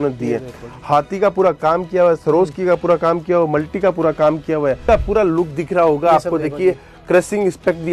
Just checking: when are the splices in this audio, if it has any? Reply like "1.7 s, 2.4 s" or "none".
4.8 s